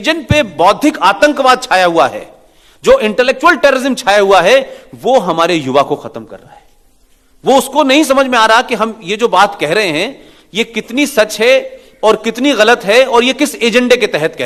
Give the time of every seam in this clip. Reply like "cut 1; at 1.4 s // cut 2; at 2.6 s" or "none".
none